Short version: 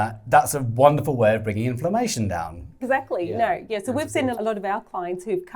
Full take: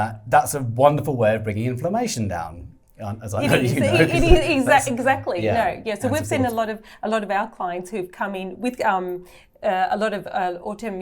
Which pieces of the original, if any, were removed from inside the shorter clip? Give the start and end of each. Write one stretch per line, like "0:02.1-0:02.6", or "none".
0:02.8-0:04.9
0:06.5-0:07.0